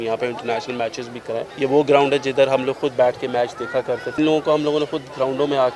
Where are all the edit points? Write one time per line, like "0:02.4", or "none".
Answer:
0:01.5
0:04.2